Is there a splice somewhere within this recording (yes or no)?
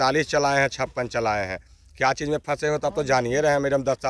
no